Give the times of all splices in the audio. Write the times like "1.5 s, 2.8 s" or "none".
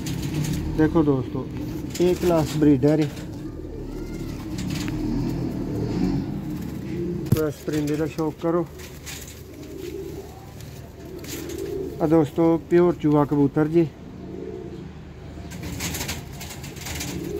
7.3 s